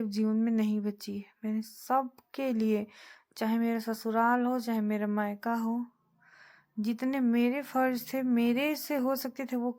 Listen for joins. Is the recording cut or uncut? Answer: uncut